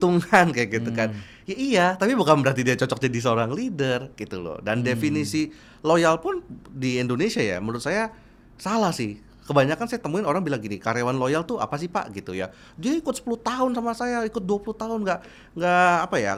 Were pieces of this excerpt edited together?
no; 0 cuts

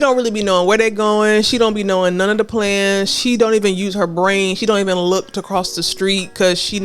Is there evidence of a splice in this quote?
no; 0 cuts

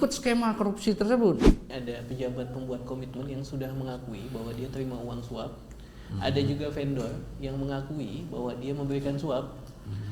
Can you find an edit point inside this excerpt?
yes; 1 cut; at 1.7 s

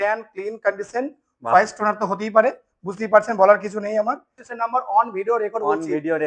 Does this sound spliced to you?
yes; 1 cut; at 4.4 s

